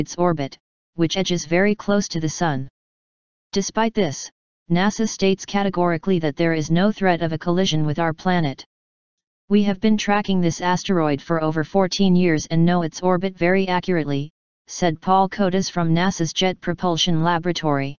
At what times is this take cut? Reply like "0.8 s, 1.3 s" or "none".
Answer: 16.8 s